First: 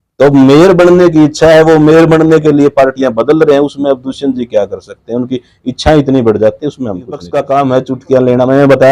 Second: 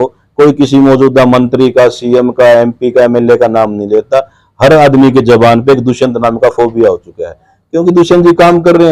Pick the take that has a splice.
first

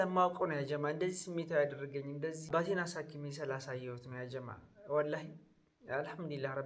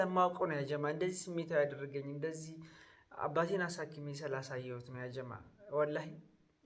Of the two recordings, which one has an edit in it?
first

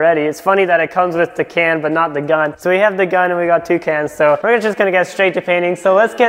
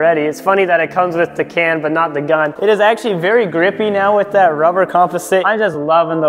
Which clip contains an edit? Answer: second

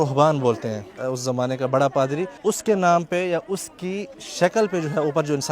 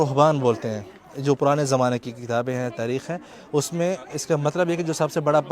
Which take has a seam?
first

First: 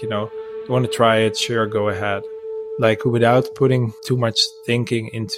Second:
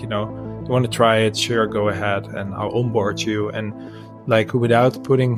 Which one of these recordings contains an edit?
first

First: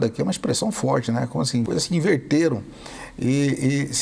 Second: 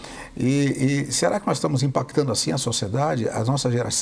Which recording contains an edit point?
first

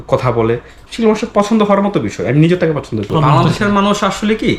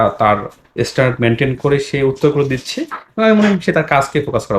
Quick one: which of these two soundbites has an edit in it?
first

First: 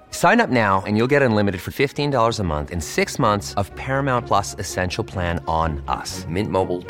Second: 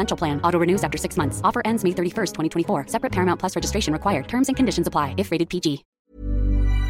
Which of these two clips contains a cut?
second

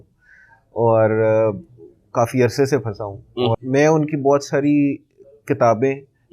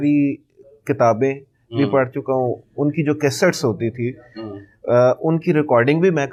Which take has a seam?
first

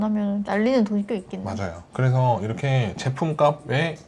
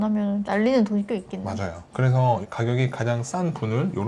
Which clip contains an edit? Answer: second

